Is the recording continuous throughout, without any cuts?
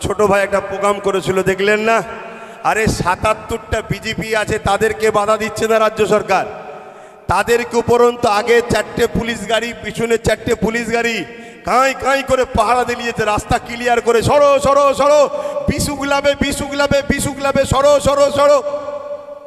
yes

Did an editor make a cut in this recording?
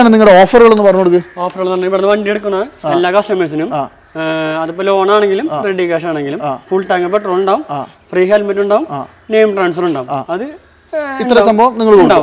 no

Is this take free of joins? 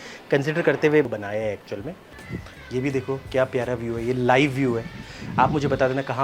no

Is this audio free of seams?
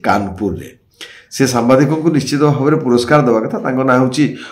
yes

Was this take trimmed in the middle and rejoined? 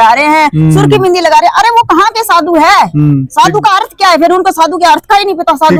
no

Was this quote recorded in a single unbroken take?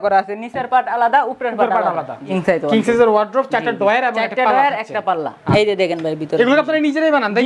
no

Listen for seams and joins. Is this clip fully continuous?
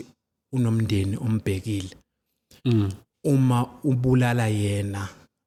yes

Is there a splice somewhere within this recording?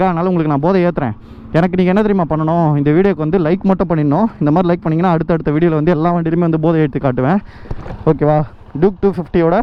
no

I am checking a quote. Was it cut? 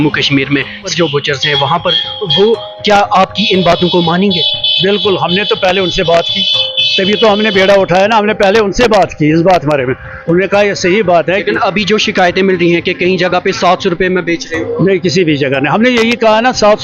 yes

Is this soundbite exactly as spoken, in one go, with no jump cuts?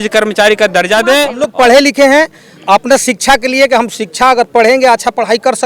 no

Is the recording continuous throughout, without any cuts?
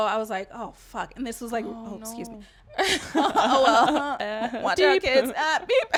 yes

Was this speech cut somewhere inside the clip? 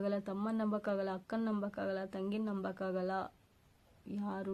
no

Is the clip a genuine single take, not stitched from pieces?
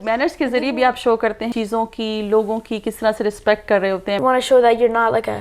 no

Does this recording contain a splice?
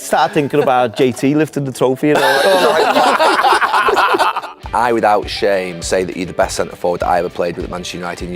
yes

